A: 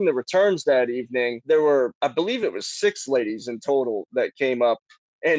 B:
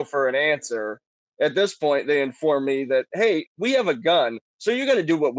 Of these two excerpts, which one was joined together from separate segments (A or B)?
A